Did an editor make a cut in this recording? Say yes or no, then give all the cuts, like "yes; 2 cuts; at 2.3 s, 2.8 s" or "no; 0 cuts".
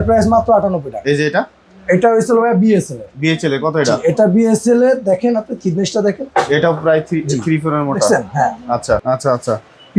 yes; 1 cut; at 9.0 s